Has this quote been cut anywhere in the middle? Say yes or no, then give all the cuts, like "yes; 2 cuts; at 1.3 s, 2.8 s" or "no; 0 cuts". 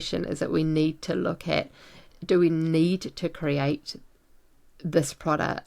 yes; 1 cut; at 2.1 s